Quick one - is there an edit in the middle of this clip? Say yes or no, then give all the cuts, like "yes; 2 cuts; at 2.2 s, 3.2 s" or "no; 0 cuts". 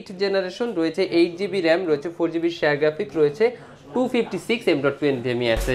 no; 0 cuts